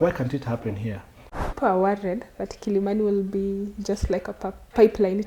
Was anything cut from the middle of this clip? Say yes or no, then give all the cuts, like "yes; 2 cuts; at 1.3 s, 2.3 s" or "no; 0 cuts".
yes; 1 cut; at 1.5 s